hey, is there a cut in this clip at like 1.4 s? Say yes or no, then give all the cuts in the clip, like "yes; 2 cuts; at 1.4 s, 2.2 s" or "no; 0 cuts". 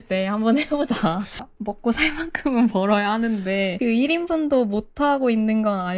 yes; 2 cuts; at 1.4 s, 3.7 s